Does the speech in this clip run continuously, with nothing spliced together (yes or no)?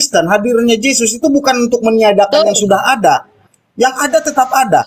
yes